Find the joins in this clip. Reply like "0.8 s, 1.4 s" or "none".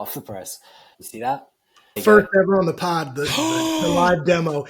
1.0 s, 2.0 s

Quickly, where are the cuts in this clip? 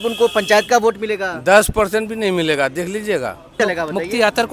3.6 s

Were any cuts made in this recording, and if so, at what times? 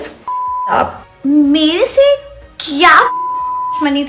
1.0 s

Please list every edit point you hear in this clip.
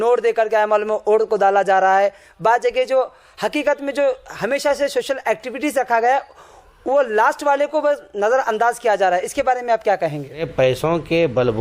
10.5 s

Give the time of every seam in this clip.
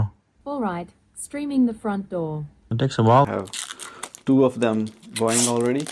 3.3 s

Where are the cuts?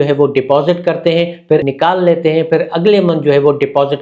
1.6 s

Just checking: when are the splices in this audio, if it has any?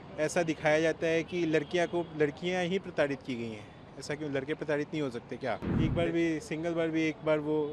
5.7 s

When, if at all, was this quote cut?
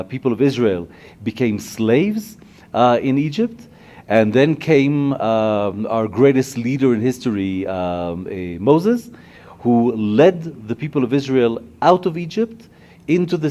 10.2 s

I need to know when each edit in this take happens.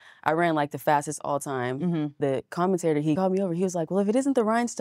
2.2 s, 3.2 s

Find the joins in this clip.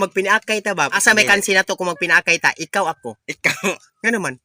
1.0 s

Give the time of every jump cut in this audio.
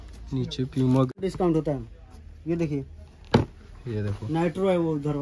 1.2 s

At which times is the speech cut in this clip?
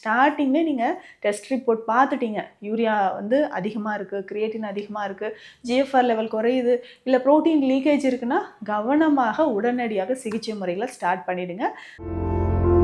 11.9 s

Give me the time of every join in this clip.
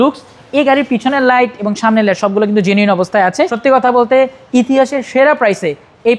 3.5 s

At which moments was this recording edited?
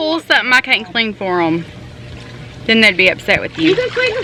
none

